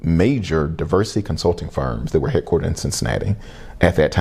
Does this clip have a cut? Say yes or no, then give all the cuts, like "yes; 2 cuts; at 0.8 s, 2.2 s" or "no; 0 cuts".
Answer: no; 0 cuts